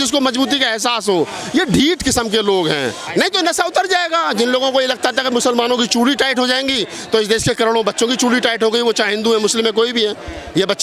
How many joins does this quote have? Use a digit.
1